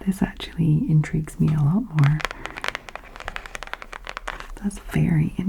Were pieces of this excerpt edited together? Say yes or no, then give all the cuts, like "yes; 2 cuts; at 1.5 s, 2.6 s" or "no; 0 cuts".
no; 0 cuts